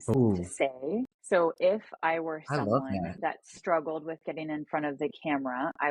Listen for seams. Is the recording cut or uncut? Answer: uncut